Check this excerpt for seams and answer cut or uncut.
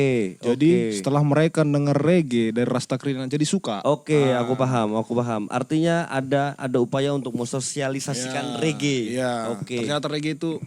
uncut